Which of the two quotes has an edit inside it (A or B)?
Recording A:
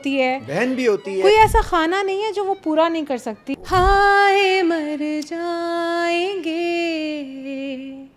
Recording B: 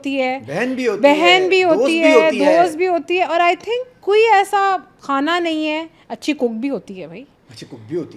A